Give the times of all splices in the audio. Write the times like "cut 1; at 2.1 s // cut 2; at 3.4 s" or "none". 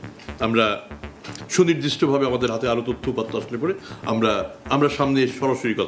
none